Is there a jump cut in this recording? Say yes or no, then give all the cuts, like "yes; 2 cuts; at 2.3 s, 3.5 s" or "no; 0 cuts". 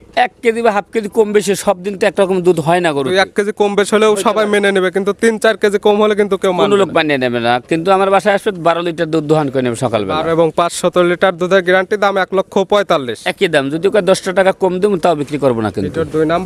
no; 0 cuts